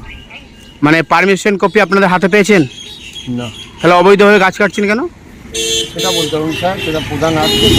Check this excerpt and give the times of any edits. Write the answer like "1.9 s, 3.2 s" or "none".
none